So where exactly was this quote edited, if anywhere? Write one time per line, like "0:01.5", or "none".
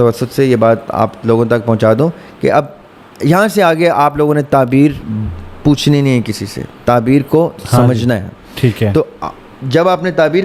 none